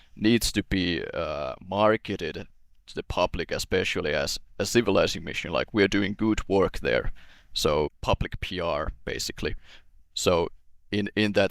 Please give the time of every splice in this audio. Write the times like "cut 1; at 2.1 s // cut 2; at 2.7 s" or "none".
cut 1; at 8.0 s